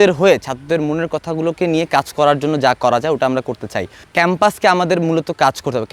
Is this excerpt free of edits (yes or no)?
yes